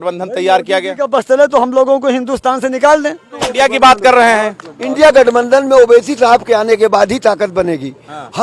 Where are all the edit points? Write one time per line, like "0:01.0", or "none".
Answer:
0:03.4